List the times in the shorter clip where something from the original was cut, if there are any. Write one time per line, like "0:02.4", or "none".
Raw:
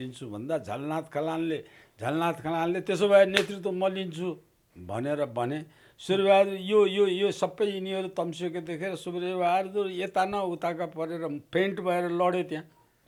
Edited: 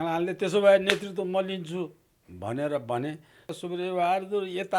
0:03.5